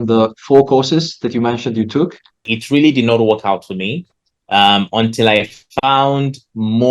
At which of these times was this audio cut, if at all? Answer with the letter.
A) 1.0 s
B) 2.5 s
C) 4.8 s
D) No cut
B